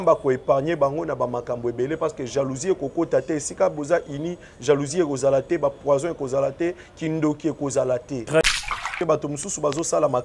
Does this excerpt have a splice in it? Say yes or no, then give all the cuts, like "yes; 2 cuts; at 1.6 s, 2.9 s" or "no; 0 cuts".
yes; 1 cut; at 9.0 s